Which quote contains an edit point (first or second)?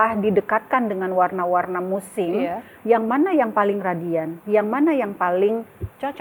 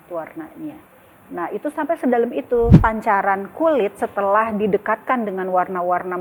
second